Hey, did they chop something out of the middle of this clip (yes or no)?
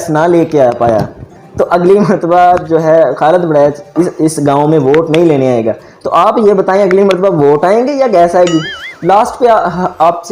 yes